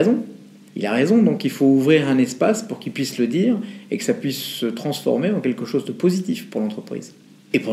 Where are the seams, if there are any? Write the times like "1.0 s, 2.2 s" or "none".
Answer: none